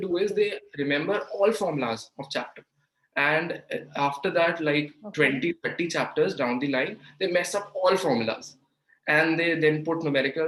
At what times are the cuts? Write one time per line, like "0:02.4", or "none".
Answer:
none